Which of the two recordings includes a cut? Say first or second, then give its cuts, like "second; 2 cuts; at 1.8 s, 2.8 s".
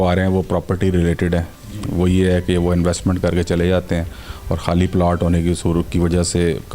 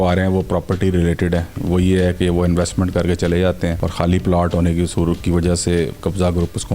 second; 2 cuts; at 1.5 s, 3.8 s